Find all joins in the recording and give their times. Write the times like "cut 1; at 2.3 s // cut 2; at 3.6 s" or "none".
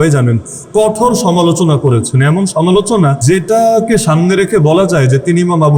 cut 1; at 3.2 s